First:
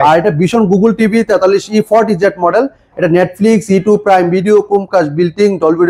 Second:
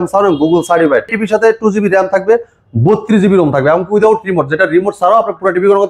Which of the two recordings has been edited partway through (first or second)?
second